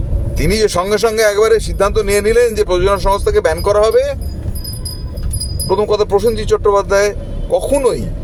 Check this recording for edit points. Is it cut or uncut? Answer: uncut